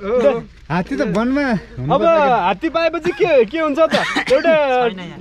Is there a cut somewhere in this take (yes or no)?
no